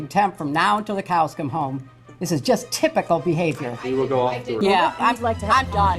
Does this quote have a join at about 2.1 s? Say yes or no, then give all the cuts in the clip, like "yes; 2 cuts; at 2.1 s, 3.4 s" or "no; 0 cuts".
no; 1 cut; at 4.6 s